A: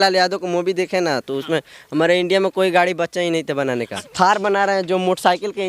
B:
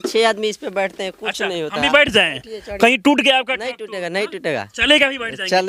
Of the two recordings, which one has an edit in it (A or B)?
A